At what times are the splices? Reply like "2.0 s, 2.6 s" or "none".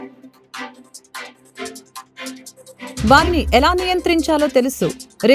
2.1 s, 3.0 s